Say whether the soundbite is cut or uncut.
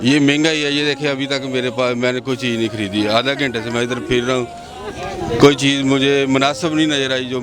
uncut